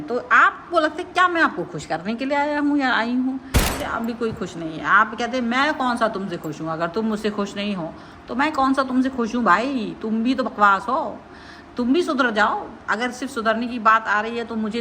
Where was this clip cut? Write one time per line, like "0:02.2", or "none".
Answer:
0:03.8